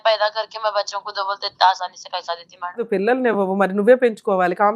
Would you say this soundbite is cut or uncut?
cut